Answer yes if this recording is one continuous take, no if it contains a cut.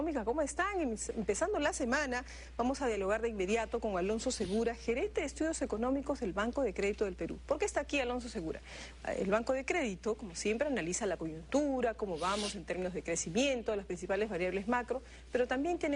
yes